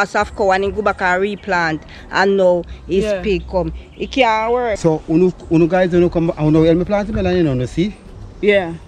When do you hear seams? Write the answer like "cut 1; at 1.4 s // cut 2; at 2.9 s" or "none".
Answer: cut 1; at 4.8 s